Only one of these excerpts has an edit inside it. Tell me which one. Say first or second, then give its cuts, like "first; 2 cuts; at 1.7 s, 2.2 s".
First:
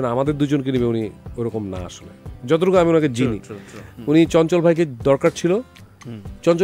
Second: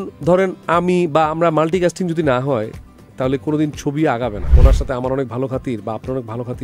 second; 1 cut; at 4.5 s